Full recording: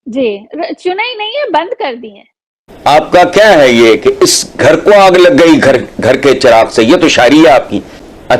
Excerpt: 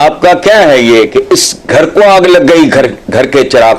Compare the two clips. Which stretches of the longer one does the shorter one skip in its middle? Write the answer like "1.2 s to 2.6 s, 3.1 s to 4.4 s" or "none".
none